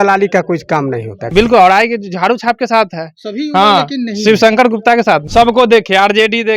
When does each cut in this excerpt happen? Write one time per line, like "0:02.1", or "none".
0:01.3
0:05.2